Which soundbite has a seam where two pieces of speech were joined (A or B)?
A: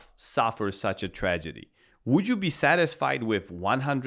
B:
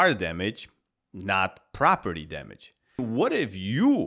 B